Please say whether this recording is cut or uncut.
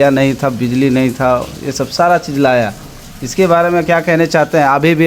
uncut